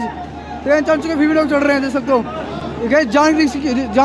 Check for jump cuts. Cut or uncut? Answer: uncut